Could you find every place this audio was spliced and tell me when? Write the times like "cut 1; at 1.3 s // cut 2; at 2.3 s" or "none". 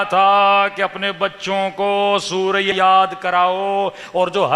cut 1; at 2.7 s